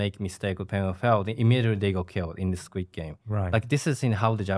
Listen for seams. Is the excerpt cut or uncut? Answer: uncut